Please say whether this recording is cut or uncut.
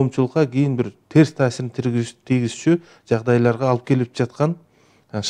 uncut